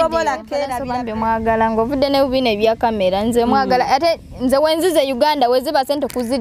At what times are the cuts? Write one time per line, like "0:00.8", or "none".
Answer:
0:00.9